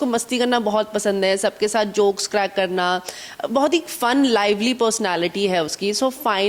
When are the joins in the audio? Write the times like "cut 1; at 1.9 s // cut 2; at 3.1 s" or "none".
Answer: none